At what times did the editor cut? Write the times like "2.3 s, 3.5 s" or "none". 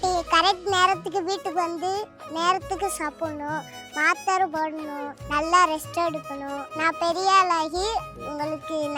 5.1 s, 6.6 s